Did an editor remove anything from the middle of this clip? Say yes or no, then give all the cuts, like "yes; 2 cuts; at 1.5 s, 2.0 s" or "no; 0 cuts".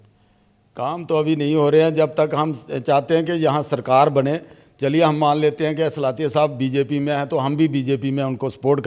no; 0 cuts